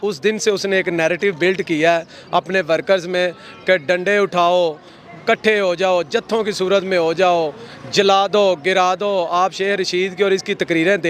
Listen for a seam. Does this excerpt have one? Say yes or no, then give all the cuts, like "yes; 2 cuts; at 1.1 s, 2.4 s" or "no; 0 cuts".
no; 0 cuts